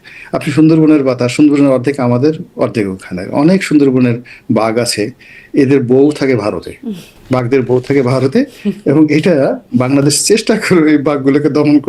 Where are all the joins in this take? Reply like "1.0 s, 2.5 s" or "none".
none